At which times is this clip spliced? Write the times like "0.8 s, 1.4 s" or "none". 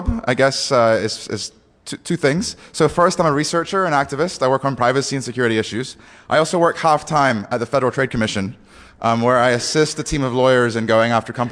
none